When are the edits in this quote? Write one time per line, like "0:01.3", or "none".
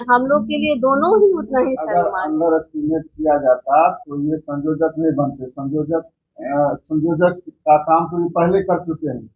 0:01.8